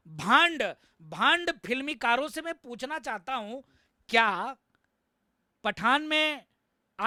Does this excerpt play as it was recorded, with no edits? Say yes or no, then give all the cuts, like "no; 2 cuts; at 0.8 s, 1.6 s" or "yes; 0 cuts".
yes; 0 cuts